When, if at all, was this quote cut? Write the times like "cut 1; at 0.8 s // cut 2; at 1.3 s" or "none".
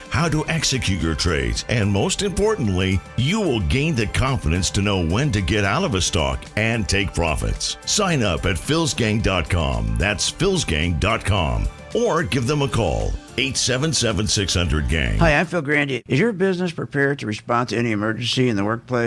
cut 1; at 15.1 s

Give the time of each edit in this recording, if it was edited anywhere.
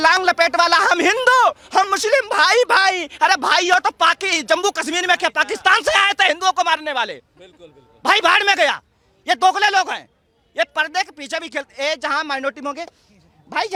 none

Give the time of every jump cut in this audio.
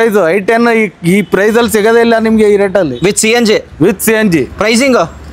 none

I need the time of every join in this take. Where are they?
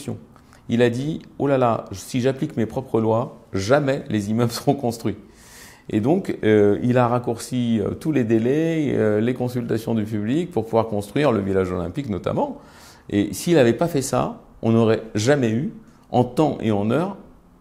none

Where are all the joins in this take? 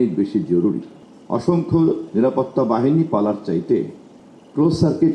cut 1; at 1.0 s

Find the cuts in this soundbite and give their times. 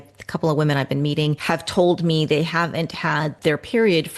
cut 1; at 1.4 s // cut 2; at 3.4 s

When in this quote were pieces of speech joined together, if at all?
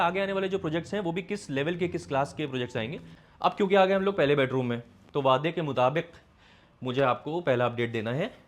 cut 1; at 3.1 s

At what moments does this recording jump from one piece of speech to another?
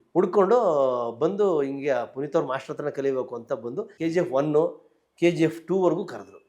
cut 1; at 3.9 s

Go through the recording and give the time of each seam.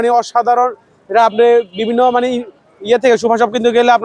none

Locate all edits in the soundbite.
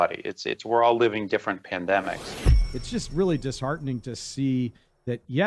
cut 1; at 2.4 s

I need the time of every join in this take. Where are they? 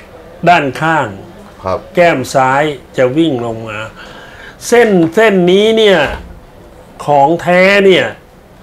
none

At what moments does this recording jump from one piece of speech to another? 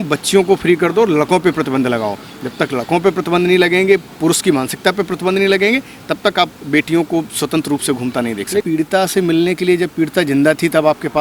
cut 1; at 8.6 s

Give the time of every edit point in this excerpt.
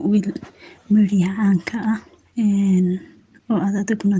cut 1; at 2.2 s

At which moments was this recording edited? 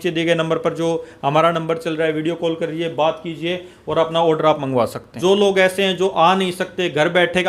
cut 1; at 5.0 s

